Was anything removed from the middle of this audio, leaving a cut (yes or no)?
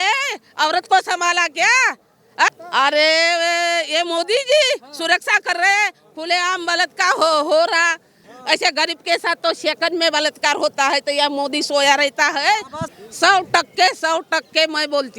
yes